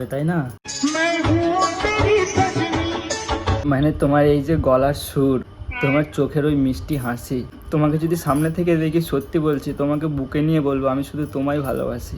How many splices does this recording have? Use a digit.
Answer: 3